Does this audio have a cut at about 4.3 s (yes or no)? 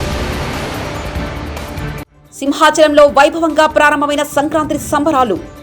no